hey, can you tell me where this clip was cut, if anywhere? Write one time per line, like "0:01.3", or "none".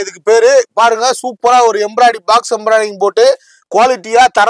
none